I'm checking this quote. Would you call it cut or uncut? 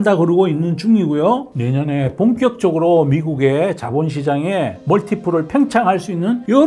uncut